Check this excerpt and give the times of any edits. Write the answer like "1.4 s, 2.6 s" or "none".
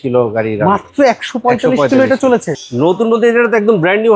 2.6 s

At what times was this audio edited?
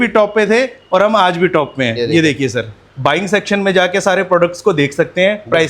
2.8 s

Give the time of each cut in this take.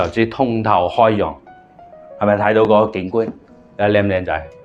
none

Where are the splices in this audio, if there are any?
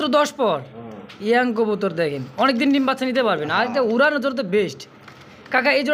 none

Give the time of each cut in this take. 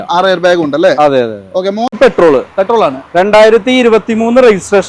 2.0 s

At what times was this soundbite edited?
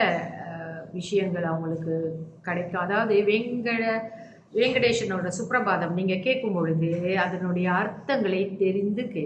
none

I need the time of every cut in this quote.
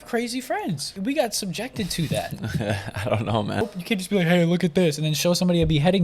0.9 s, 3.6 s

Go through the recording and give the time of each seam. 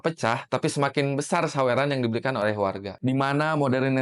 2.9 s

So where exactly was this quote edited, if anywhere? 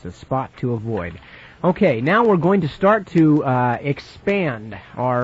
none

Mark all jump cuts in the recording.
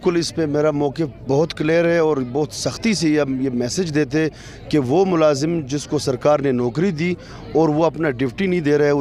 none

